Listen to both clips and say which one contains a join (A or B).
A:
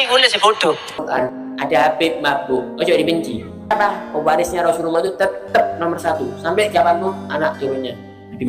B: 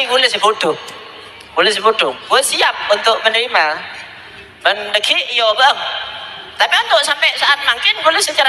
A